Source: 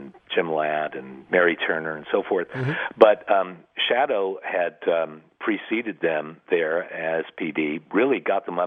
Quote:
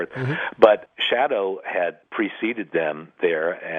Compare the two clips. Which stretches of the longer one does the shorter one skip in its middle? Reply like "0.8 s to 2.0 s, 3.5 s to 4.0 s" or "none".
3.2 s to 3.6 s, 4.8 s to 5.3 s